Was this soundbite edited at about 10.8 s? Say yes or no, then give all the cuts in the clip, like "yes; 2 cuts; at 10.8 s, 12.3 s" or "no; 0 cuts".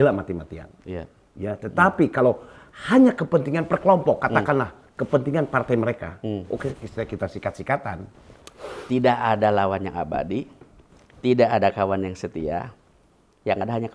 no; 1 cut; at 8.0 s